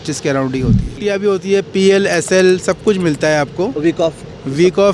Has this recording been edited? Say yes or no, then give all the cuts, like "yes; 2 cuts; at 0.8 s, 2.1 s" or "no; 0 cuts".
yes; 1 cut; at 0.9 s